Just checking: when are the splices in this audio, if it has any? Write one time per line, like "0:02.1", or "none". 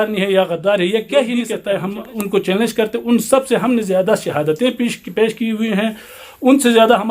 0:01.5